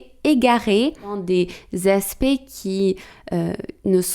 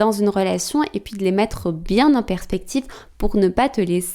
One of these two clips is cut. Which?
first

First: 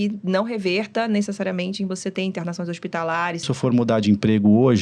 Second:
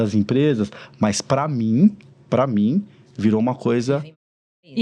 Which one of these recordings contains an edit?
first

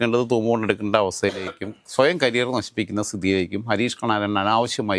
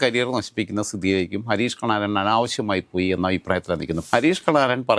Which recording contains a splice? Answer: second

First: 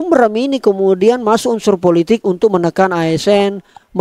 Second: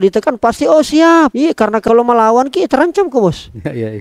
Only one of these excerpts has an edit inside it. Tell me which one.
second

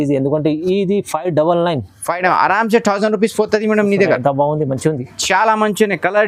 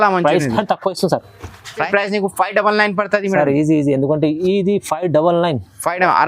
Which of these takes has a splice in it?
second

